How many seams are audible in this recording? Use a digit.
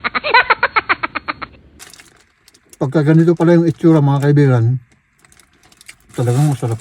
1